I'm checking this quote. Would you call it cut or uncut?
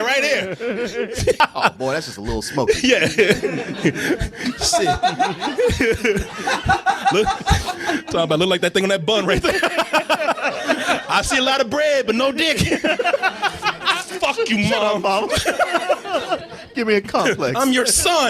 cut